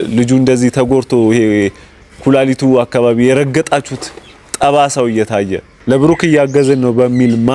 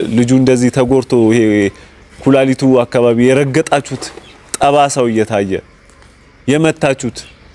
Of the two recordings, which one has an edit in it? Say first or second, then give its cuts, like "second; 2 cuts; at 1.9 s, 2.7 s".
first; 1 cut; at 5.7 s